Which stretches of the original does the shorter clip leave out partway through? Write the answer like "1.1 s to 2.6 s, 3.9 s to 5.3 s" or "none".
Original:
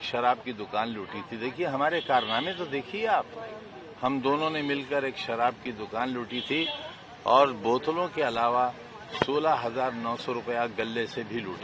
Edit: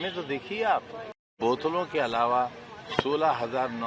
3.8 s to 7.6 s